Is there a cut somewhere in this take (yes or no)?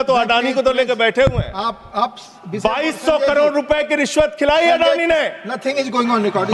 no